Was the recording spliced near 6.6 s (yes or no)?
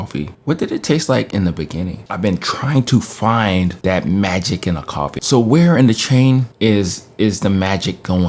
no